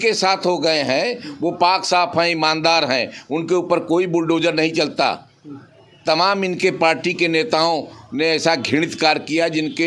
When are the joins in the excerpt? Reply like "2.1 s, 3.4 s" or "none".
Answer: none

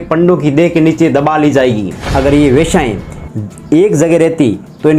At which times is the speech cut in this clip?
1.9 s

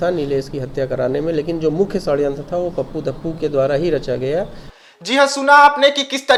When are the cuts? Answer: none

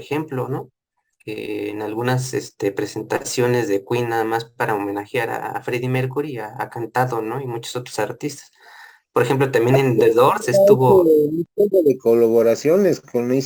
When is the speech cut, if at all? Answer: none

